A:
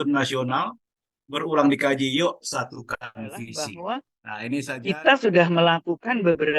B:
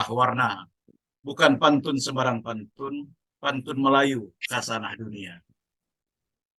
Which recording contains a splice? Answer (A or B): A